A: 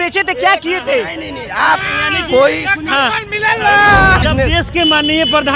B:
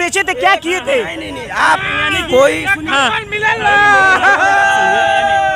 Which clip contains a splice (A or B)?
A